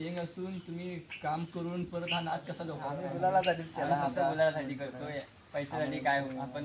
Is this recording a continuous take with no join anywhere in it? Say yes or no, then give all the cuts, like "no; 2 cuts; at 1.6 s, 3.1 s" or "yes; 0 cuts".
no; 1 cut; at 2.8 s